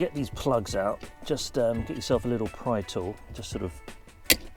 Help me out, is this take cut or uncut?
uncut